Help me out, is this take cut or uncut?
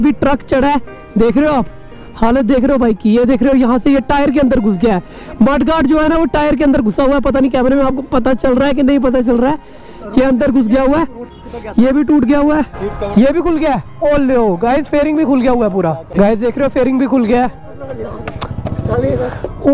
uncut